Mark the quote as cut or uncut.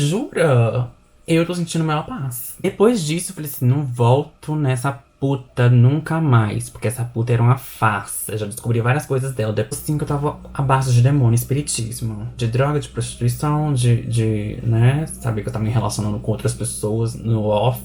cut